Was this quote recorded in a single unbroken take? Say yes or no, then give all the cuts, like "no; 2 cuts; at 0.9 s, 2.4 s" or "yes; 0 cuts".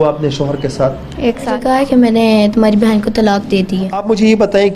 no; 2 cuts; at 1.6 s, 4.0 s